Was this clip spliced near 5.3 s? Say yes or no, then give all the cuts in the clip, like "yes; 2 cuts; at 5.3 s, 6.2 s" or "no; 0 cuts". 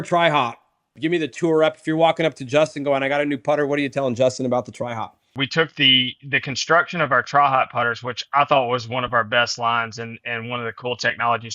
yes; 2 cuts; at 0.9 s, 5.3 s